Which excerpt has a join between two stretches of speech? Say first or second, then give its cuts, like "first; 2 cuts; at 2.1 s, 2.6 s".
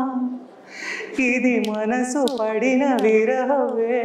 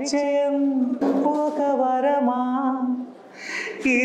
second; 1 cut; at 1.0 s